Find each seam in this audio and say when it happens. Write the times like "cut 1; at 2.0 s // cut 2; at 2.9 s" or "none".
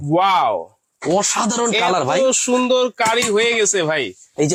none

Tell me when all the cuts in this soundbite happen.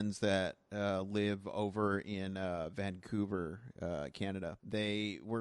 cut 1; at 4.5 s

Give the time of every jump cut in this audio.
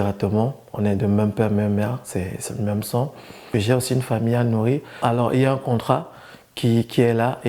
cut 1; at 3.4 s // cut 2; at 5.0 s

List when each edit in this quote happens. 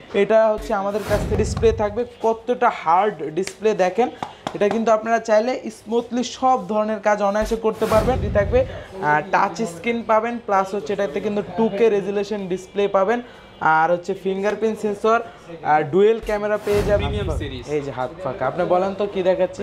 cut 1; at 1.3 s // cut 2; at 8.2 s // cut 3; at 17.0 s

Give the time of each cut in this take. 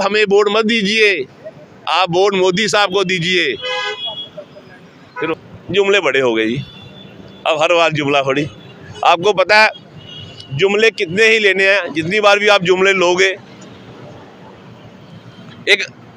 cut 1; at 5.3 s

